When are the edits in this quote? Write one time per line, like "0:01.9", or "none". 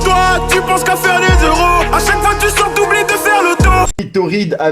0:01.5
0:03.9